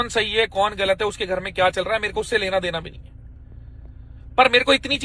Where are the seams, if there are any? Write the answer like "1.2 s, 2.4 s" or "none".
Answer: none